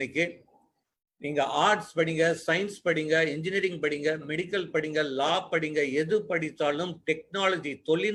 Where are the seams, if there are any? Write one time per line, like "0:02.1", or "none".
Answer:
none